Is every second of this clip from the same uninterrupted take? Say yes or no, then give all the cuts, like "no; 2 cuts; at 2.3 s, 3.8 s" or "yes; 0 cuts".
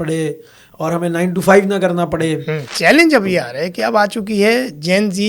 no; 1 cut; at 2.6 s